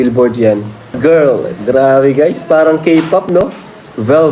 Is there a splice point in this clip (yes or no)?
yes